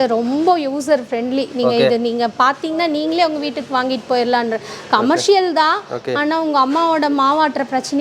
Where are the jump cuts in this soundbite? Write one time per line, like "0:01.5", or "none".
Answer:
none

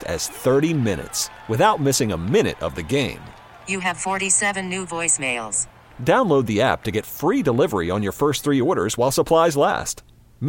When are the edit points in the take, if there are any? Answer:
none

